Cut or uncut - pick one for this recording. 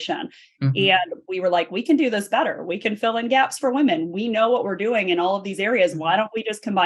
uncut